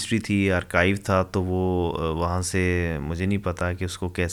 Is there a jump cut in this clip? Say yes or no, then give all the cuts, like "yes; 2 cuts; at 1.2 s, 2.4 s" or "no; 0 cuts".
no; 0 cuts